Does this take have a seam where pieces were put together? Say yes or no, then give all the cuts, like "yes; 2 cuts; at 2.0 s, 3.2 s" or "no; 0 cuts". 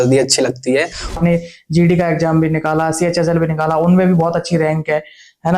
yes; 1 cut; at 1.2 s